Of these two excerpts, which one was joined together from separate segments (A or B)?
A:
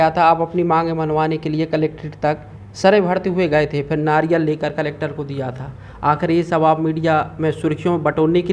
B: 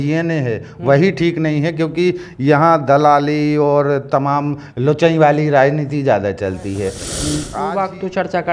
B